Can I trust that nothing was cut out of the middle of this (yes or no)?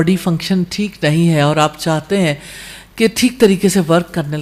yes